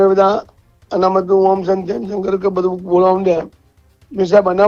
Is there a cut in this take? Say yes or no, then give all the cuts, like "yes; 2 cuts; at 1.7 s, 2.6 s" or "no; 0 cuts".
no; 0 cuts